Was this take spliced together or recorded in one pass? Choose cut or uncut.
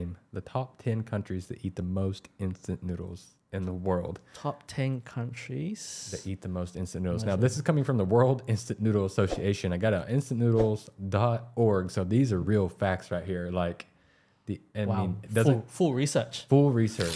uncut